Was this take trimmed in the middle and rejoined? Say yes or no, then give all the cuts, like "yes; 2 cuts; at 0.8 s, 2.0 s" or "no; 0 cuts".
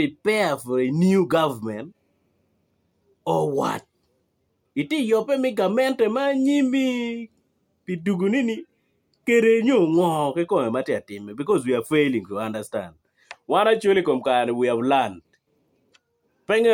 no; 0 cuts